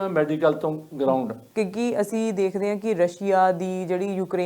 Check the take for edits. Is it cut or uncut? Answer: cut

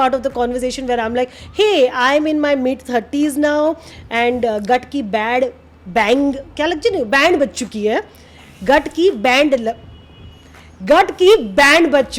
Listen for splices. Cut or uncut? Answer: uncut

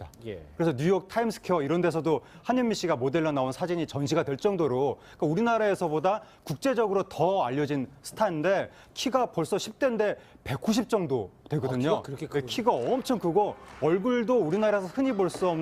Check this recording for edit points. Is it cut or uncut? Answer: cut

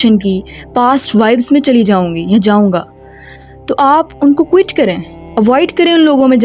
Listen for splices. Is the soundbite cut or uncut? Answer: uncut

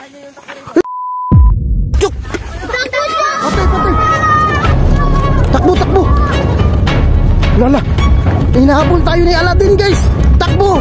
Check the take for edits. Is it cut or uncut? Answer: cut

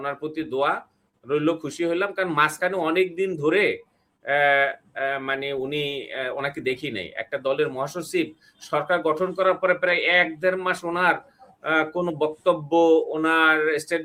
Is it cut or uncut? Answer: uncut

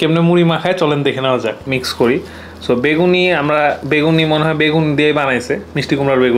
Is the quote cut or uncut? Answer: cut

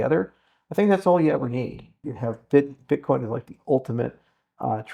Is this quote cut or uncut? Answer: cut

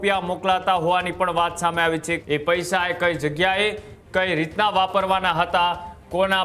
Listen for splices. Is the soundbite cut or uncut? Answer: cut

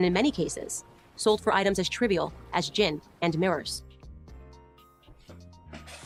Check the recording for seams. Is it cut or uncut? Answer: uncut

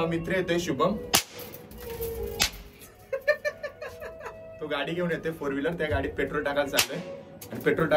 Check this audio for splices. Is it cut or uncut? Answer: uncut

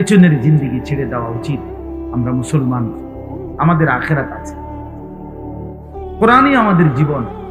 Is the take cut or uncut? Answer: uncut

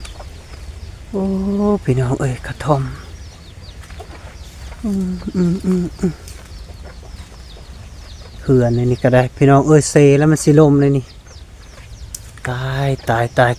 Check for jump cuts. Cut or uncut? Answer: uncut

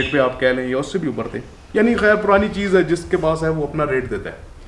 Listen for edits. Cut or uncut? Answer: uncut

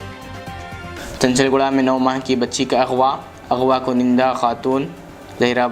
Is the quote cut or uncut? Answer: cut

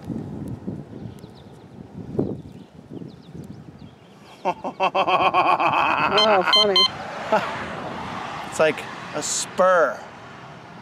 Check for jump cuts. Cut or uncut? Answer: uncut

